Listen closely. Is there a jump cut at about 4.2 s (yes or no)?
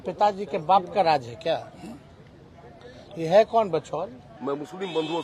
yes